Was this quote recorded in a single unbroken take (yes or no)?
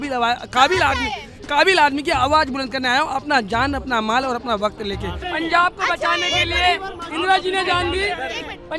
no